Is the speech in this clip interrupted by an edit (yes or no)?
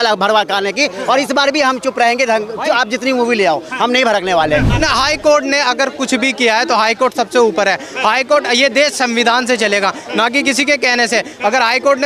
yes